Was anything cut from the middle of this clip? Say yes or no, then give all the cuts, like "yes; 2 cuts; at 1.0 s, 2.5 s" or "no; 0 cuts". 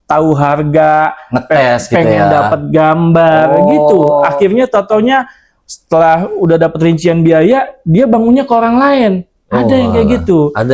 no; 0 cuts